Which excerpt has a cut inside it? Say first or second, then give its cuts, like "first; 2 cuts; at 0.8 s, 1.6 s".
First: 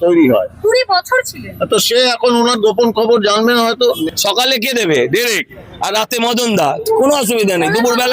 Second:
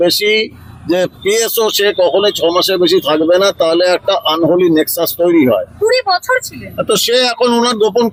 first; 1 cut; at 4.0 s